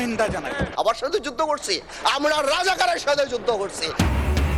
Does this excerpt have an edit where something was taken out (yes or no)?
no